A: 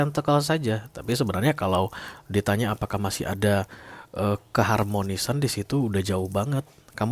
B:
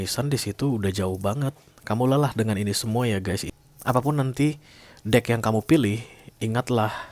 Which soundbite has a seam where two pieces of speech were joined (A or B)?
B